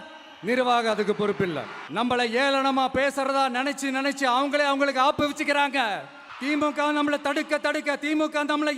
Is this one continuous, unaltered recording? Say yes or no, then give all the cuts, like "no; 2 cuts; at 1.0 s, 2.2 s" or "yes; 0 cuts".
no; 1 cut; at 1.9 s